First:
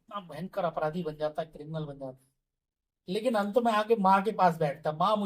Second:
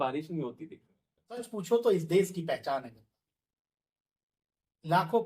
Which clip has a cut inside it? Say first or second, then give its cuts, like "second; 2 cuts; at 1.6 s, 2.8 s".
second; 1 cut; at 1.5 s